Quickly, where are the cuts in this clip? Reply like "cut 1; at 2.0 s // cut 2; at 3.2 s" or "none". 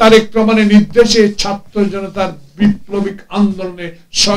none